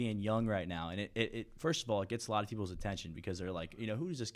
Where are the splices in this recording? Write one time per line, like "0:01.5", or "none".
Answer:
none

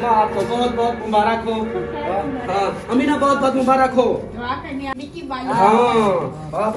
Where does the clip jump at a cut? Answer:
0:04.9

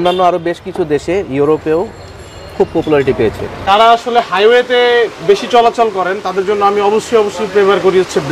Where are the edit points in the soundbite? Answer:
0:03.6

